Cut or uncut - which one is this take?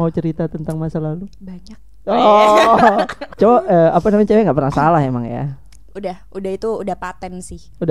cut